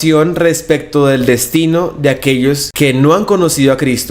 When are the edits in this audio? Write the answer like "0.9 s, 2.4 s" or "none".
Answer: 2.7 s